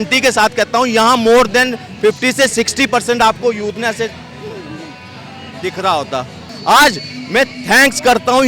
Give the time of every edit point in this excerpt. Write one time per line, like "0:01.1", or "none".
0:06.5